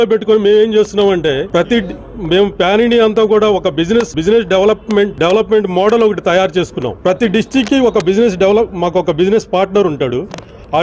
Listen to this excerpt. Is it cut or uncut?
cut